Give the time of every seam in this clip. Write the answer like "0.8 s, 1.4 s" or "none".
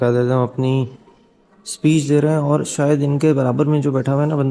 none